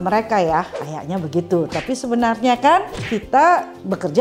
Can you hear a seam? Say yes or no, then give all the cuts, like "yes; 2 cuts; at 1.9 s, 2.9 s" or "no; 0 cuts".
no; 0 cuts